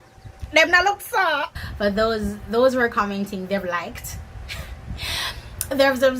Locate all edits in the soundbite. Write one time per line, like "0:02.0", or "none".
0:01.6